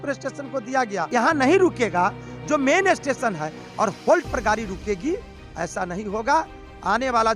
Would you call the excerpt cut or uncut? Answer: cut